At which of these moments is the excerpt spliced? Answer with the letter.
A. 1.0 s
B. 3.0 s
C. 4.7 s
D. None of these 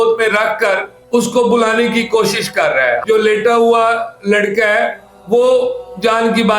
B